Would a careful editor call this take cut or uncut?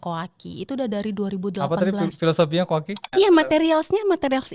cut